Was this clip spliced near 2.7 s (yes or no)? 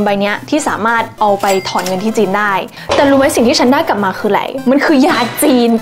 yes